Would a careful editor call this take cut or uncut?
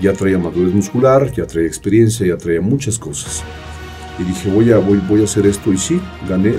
uncut